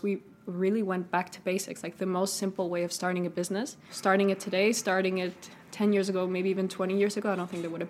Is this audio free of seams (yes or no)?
no